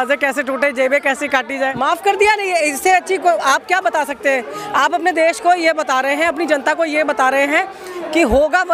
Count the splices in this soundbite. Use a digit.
1